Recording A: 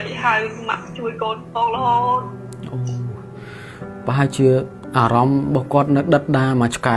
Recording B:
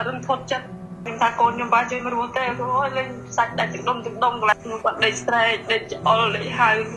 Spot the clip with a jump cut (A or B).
B